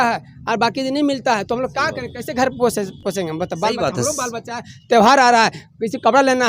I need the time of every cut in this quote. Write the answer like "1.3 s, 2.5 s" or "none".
3.0 s

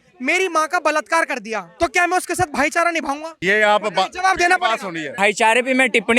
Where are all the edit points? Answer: 1.7 s, 3.4 s, 5.1 s

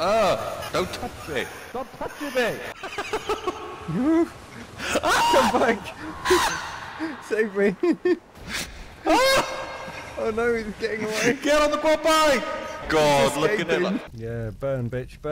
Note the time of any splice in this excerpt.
2.7 s, 12.7 s, 14.1 s

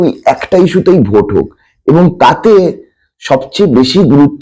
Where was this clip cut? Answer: none

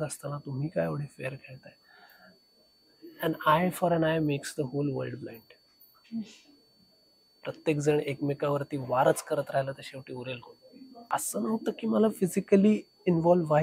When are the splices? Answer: 11.0 s

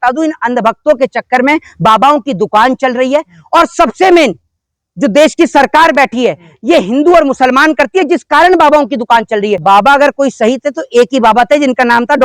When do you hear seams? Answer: 9.6 s

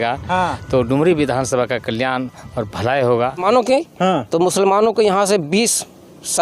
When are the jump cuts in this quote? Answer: 3.4 s

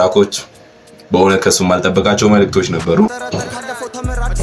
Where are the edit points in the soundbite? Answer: 3.2 s

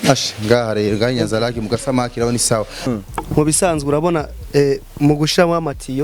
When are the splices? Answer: 2.9 s

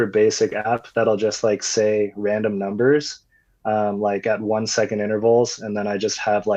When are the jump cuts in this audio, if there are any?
none

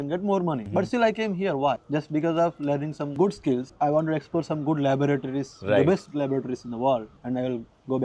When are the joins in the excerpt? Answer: none

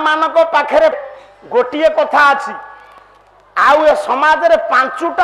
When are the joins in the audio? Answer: 1.1 s

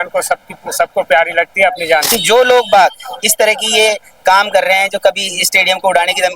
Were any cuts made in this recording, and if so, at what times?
2.1 s

